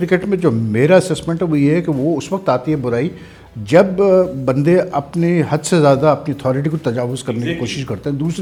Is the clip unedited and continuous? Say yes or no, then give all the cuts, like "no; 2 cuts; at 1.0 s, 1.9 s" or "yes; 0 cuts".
yes; 0 cuts